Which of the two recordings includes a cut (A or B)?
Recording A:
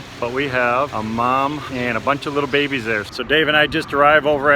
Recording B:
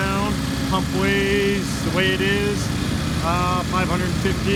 A